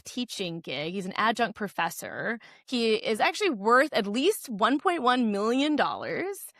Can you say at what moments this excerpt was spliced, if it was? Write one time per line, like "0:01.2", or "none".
0:02.5